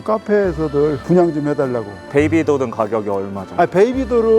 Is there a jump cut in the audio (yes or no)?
no